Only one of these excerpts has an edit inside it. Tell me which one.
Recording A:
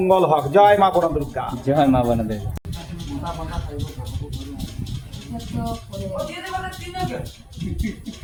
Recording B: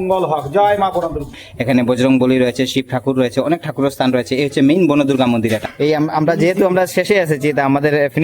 B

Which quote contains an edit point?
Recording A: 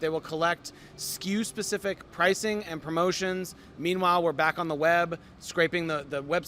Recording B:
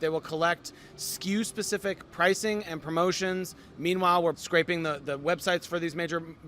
B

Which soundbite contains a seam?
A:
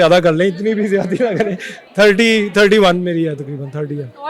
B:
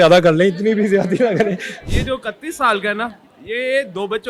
B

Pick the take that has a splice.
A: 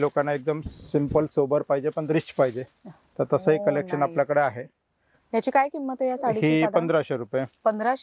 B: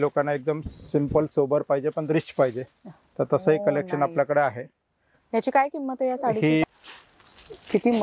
B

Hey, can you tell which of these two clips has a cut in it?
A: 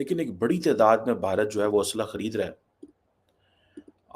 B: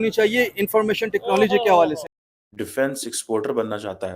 B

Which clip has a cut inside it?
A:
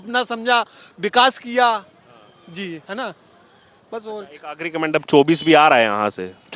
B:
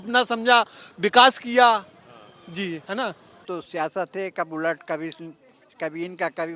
B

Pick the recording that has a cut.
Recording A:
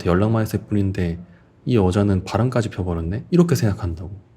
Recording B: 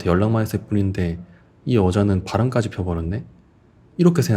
A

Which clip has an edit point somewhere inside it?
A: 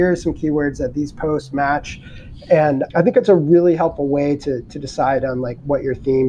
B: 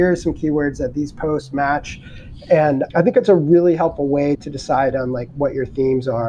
B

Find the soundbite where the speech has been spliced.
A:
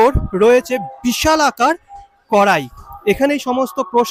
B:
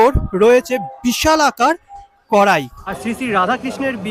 B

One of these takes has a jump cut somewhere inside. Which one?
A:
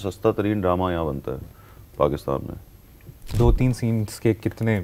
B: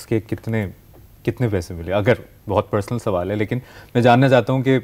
A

